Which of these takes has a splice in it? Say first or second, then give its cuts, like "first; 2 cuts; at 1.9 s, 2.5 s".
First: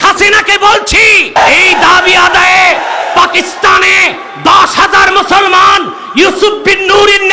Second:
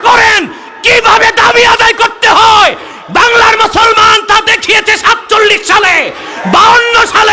first; 1 cut; at 1.4 s